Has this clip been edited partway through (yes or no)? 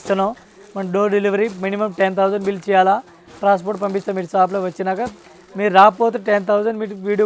no